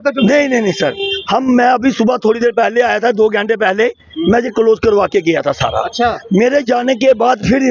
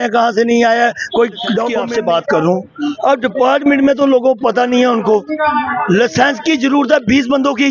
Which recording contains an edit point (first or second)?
second